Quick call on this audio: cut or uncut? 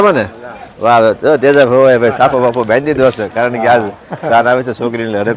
uncut